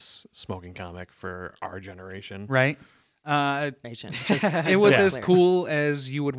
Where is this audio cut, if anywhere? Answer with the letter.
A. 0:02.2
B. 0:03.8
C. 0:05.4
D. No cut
B